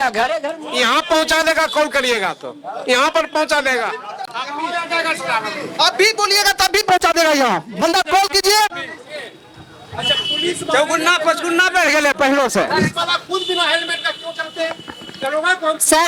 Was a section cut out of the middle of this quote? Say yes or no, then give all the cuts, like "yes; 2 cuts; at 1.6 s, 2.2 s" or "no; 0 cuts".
no; 0 cuts